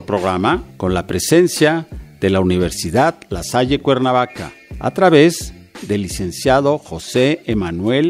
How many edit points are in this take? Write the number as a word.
zero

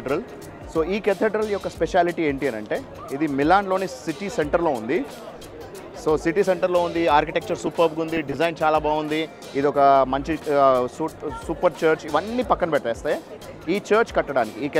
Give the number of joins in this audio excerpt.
zero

